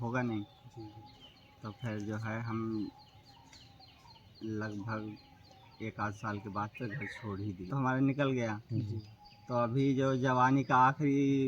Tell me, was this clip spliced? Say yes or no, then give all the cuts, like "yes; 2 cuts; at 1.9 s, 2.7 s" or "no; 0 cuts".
yes; 1 cut; at 7.7 s